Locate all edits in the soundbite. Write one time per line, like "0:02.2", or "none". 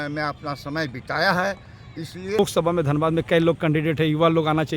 0:02.4